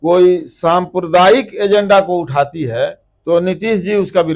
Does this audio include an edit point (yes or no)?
yes